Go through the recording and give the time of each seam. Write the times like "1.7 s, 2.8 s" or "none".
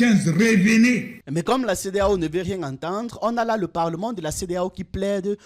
1.2 s